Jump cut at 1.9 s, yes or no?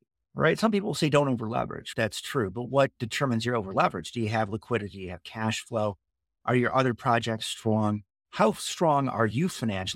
yes